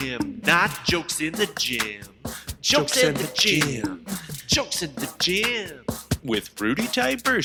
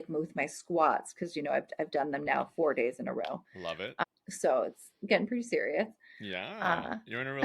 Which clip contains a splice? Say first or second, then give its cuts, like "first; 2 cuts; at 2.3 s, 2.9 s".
second; 1 cut; at 3.8 s